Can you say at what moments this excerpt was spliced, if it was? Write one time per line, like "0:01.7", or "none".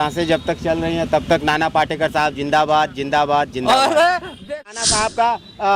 0:04.8